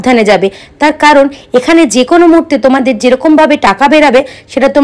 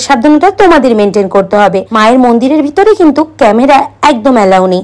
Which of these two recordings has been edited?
second; 1 cut; at 1.9 s

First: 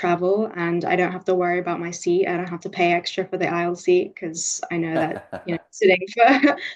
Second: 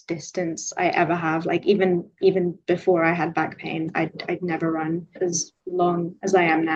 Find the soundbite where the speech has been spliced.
second; 1 cut; at 5.1 s

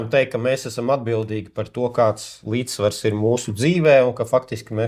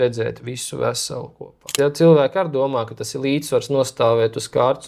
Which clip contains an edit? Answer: second; 1 cut; at 1.7 s

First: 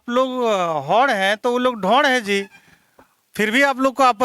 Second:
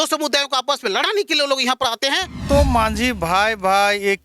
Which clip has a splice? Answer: second; 1 cut; at 2.4 s

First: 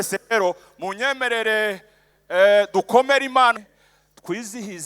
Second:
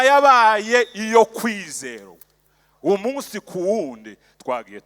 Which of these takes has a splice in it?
first; 1 cut; at 3.5 s

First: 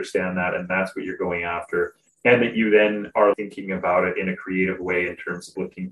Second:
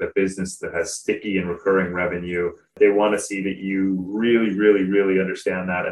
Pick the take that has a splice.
second; 1 cut; at 2.7 s

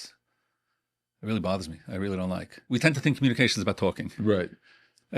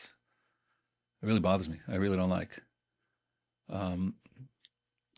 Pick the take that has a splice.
first; 1 cut; at 2.5 s

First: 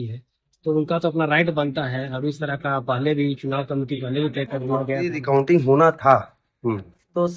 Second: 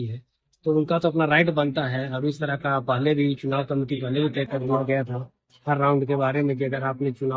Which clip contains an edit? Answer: first; 1 cut; at 5.2 s

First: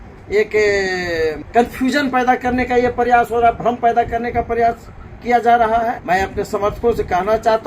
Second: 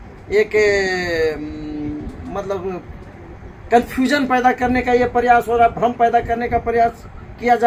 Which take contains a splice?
first; 2 cuts; at 1.4 s, 6.0 s

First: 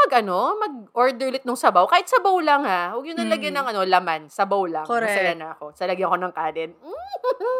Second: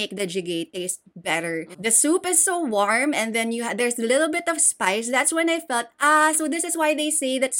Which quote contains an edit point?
second; 1 cut; at 1.8 s

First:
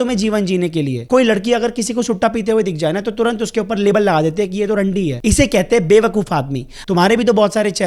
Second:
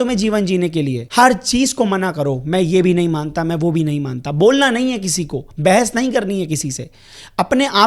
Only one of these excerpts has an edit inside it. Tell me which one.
first; 2 cuts; at 1.0 s, 6.7 s

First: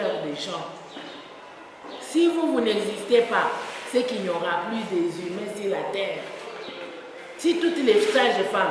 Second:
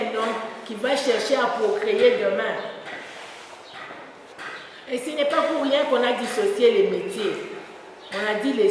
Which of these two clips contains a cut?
second; 1 cut; at 4.3 s

